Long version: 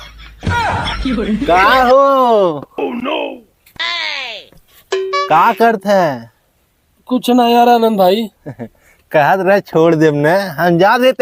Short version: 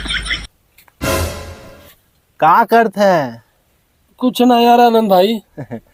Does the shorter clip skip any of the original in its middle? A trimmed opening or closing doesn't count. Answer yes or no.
no